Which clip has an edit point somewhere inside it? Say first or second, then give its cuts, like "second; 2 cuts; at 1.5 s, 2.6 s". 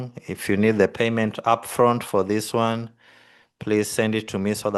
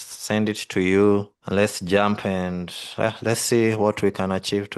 second; 1 cut; at 1.4 s